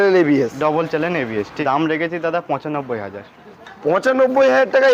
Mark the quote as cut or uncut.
cut